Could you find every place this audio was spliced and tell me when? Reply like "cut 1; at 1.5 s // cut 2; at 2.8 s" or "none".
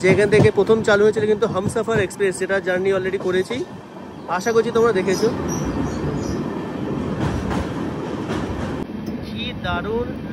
cut 1; at 8.8 s